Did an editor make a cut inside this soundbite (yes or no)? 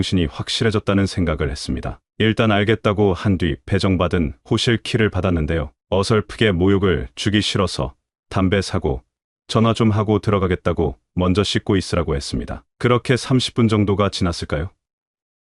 no